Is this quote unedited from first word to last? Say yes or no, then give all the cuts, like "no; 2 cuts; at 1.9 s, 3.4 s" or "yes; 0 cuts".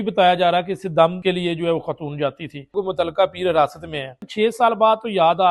no; 3 cuts; at 1.2 s, 2.7 s, 4.2 s